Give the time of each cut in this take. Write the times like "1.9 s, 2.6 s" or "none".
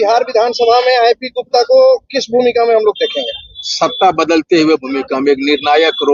none